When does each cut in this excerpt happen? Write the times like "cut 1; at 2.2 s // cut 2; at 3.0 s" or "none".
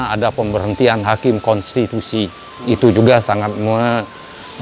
none